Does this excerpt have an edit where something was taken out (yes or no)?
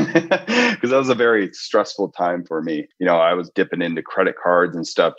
no